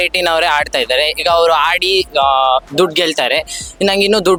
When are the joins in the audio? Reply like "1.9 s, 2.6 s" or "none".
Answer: none